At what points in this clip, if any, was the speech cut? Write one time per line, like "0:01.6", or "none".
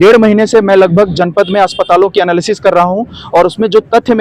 none